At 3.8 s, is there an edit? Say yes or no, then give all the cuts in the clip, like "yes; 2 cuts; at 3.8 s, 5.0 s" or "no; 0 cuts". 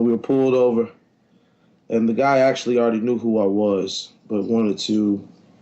no; 1 cut; at 2.6 s